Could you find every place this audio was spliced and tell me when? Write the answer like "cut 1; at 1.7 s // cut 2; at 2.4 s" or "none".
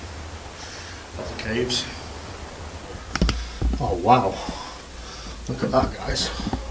cut 1; at 3.1 s

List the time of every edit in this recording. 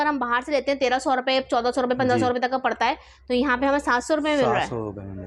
none

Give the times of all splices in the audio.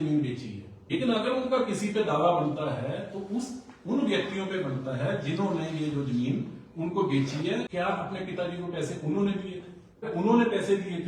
cut 1; at 0.9 s // cut 2; at 7.7 s // cut 3; at 10.1 s

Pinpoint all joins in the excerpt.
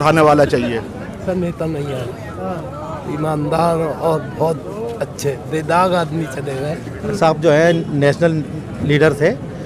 cut 1; at 1.3 s // cut 2; at 7.1 s

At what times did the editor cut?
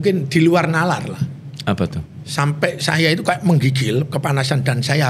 none

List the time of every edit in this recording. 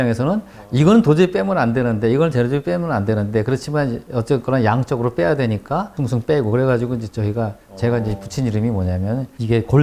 none

